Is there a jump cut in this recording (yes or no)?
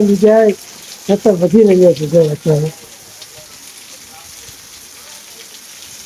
no